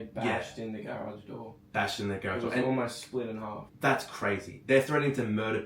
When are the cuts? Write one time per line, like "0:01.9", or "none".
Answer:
0:03.6